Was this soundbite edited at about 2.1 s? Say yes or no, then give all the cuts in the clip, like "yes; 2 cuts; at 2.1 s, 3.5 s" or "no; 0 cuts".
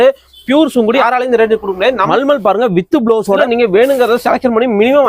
yes; 3 cuts; at 1.0 s, 2.1 s, 3.4 s